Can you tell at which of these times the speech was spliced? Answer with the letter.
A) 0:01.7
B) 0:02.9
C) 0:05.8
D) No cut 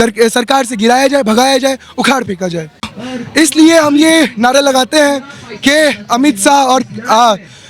B